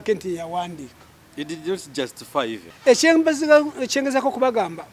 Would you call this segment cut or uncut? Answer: cut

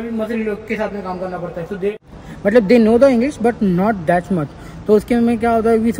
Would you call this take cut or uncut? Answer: uncut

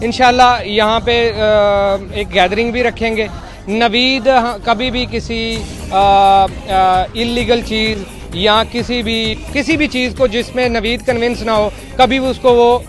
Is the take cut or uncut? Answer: cut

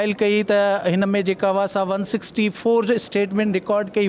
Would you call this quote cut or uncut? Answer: uncut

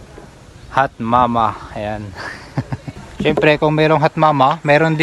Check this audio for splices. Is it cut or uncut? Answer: cut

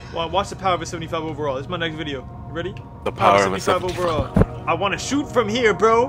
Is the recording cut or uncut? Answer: cut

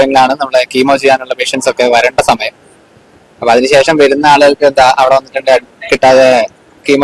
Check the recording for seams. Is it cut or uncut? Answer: uncut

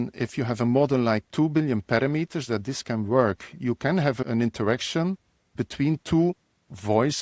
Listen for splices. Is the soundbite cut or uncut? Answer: uncut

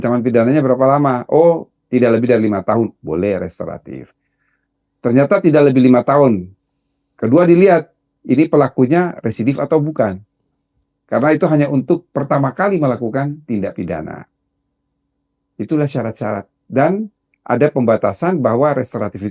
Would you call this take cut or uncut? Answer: uncut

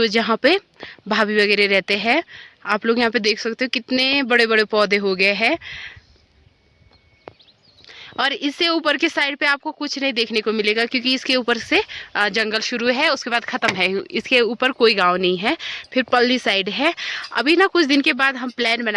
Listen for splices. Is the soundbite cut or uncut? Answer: uncut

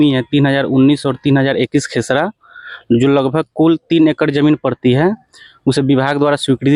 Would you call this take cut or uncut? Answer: uncut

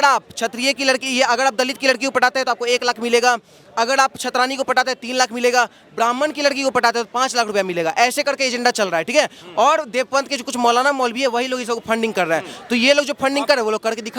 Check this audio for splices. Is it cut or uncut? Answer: uncut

